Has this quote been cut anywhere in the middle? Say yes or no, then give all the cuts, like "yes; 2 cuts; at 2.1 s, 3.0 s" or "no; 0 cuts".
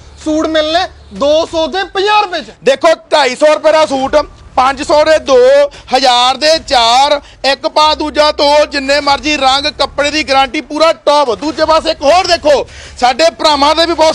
no; 0 cuts